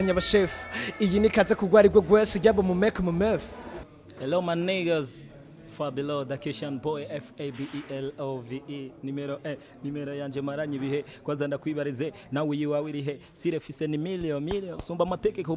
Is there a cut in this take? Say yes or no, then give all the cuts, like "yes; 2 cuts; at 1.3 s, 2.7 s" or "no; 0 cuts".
yes; 1 cut; at 3.6 s